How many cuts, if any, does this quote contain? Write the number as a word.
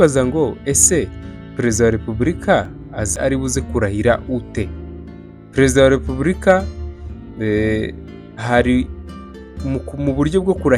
one